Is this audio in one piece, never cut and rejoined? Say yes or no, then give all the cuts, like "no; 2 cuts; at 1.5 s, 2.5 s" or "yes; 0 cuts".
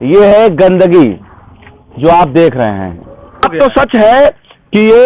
no; 1 cut; at 3.5 s